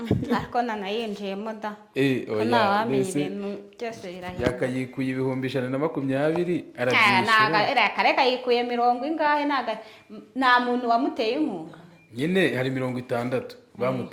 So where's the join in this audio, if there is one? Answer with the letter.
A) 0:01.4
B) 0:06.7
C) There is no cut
C